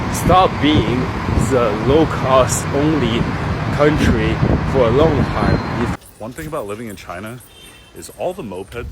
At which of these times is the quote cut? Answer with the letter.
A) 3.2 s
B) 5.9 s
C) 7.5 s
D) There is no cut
B